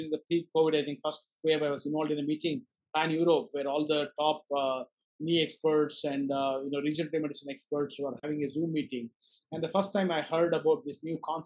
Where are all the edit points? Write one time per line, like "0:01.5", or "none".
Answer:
none